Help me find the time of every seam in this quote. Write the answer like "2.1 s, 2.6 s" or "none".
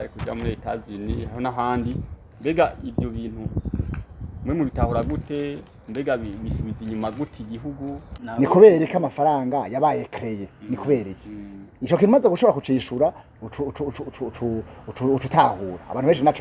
8.1 s